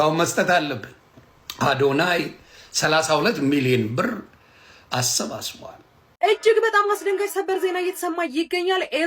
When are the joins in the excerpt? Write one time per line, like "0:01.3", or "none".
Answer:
0:06.1

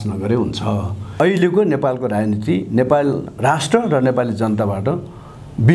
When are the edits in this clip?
0:01.2

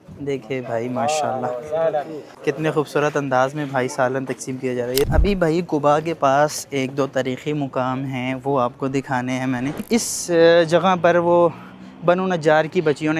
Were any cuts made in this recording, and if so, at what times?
0:05.1
0:09.8

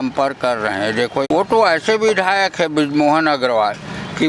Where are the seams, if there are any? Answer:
0:01.3

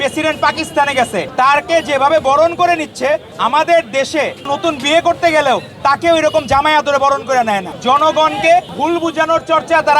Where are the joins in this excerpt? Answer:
0:01.3
0:03.3
0:04.5
0:07.7
0:08.7

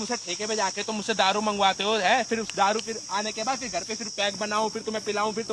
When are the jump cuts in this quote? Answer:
none

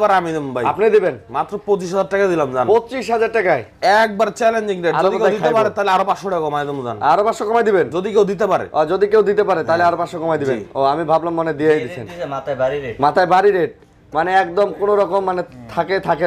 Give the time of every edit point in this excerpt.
none

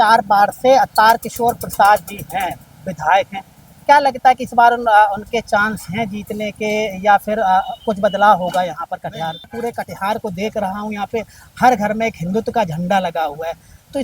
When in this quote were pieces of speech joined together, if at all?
0:09.5

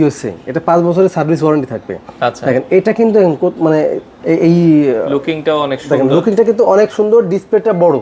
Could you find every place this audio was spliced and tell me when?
none

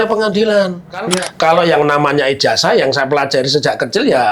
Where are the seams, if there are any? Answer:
0:01.0

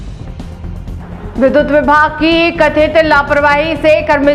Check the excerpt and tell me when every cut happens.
0:00.9

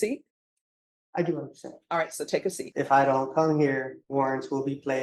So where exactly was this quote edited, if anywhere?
0:02.6
0:04.0

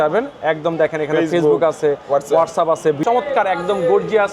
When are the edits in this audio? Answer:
0:03.0

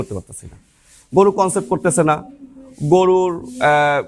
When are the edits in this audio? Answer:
none

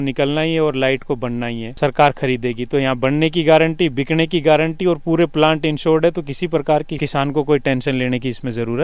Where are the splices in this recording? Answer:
0:01.7

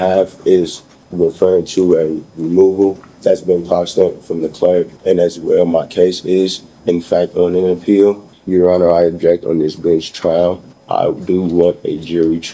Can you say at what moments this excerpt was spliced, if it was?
0:03.1
0:04.9
0:08.3
0:10.7

